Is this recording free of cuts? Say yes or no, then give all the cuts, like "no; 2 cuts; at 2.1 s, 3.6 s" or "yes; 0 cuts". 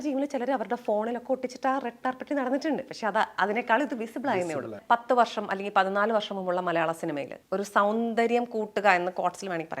no; 2 cuts; at 4.8 s, 7.3 s